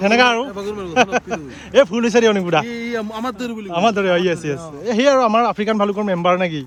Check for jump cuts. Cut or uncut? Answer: uncut